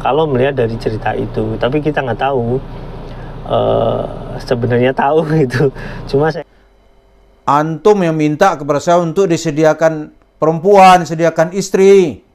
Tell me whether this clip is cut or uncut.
cut